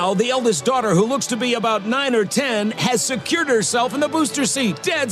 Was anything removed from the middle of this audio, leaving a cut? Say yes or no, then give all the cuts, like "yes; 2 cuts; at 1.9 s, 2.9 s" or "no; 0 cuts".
no; 0 cuts